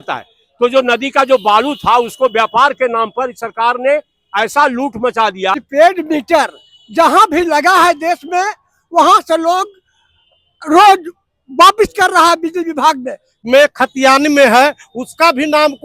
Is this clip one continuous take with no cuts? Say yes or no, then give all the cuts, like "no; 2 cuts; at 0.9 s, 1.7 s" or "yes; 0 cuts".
no; 2 cuts; at 5.5 s, 13.3 s